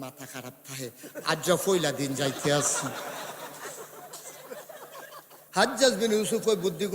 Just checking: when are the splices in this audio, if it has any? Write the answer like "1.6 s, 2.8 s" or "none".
5.4 s